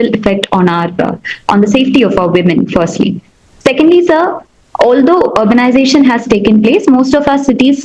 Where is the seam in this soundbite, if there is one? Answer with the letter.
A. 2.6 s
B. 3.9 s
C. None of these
C